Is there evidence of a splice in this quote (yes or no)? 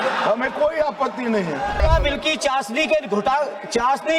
yes